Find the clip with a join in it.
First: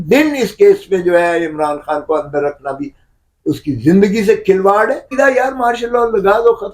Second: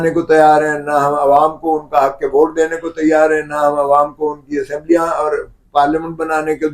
first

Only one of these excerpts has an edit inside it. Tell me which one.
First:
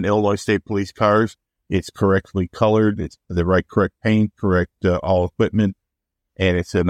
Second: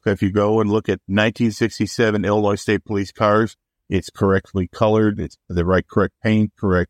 second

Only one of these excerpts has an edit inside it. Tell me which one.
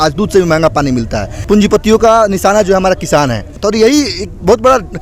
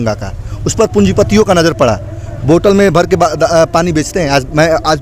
first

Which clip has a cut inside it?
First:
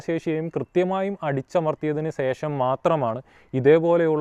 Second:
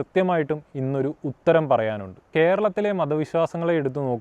second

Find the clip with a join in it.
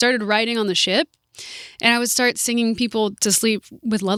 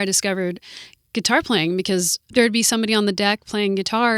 second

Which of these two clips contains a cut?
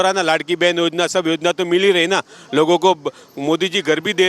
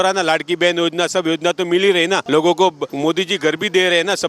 second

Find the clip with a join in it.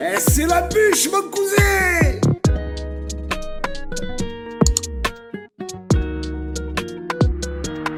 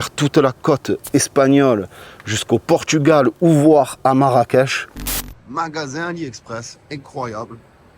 second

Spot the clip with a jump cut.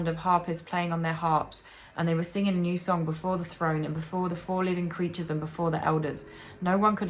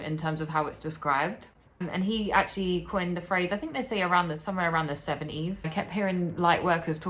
second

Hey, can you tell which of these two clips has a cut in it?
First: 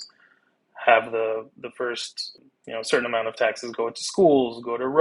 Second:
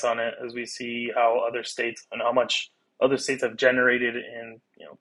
first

